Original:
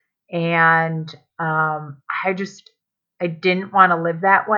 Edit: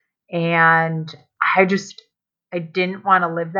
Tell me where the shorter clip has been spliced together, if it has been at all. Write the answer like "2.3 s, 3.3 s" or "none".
1.3 s